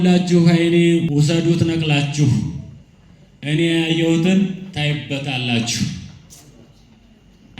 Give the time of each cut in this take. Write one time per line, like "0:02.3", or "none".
0:01.1